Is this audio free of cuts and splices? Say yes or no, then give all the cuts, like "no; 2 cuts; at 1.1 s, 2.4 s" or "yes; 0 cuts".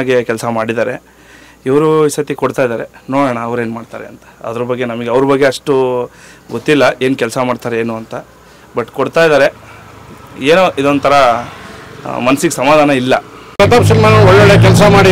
no; 1 cut; at 13.6 s